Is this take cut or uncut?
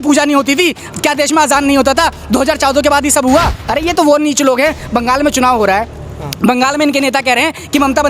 cut